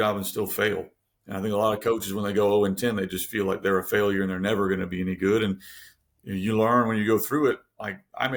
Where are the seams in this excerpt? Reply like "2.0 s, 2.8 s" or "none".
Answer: none